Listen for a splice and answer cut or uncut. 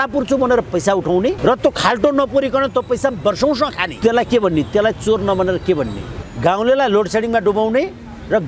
cut